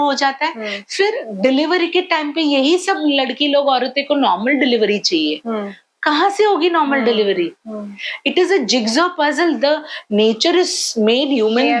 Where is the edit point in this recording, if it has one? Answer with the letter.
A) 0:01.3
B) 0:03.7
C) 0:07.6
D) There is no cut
D